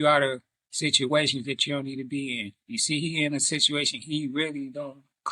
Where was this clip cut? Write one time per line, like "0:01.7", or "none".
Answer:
none